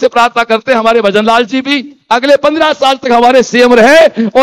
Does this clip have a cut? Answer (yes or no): no